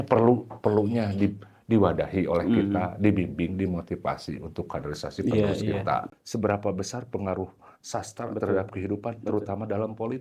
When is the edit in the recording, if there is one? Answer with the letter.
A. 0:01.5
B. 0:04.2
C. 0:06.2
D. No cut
C